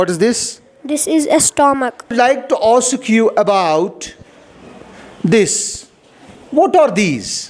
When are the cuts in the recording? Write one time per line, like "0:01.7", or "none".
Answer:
0:02.0